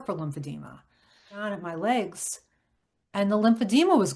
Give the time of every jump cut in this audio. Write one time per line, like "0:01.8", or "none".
0:01.4